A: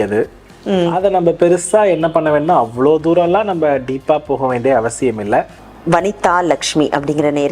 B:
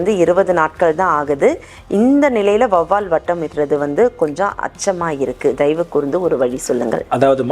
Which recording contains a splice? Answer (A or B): A